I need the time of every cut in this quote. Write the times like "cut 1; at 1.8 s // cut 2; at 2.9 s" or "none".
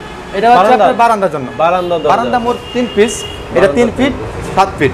none